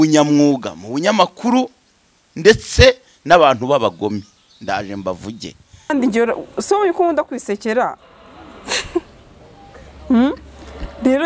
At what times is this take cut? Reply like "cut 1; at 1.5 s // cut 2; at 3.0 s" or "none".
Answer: cut 1; at 5.9 s